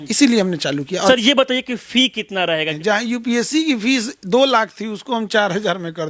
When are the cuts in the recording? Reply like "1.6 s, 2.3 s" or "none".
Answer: 1.1 s, 2.7 s